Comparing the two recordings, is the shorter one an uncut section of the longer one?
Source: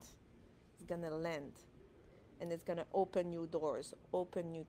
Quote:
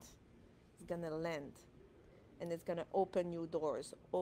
yes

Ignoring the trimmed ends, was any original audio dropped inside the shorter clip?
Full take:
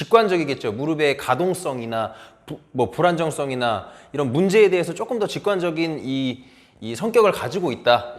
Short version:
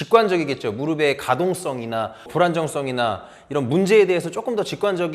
yes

